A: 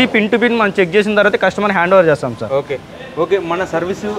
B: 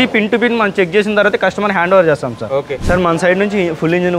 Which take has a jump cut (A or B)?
B